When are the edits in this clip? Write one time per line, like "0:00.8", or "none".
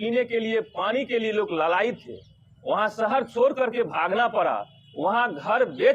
none